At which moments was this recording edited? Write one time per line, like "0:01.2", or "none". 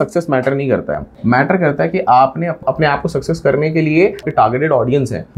0:04.2